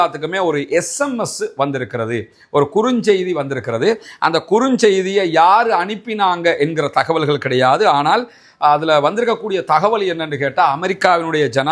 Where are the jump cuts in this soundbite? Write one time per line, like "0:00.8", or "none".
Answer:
none